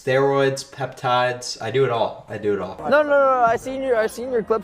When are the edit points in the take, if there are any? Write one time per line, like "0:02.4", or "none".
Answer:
0:02.7

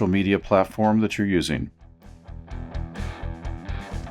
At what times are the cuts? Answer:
0:02.3

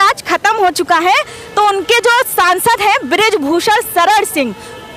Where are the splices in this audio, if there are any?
none

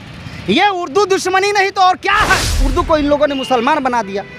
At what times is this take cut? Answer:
0:02.6

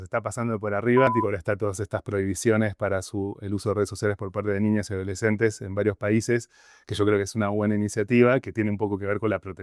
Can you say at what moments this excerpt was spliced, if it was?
0:01.1

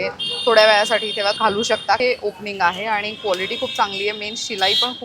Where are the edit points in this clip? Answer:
0:01.5

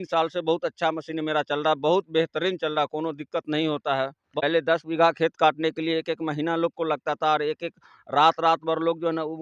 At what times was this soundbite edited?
0:04.3

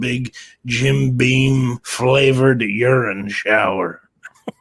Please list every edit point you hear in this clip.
0:01.8

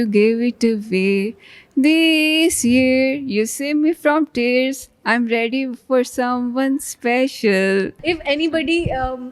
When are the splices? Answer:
0:08.0

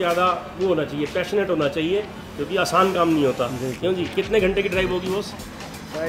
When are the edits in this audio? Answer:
none

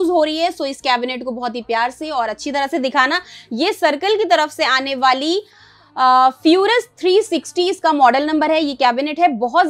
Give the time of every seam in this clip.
none

